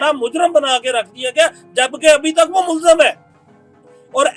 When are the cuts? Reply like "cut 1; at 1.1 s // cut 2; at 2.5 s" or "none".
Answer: none